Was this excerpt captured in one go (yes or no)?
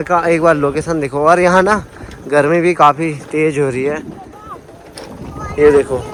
yes